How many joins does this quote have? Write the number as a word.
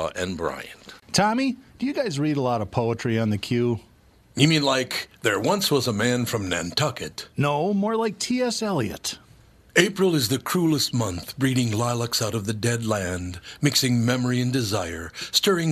one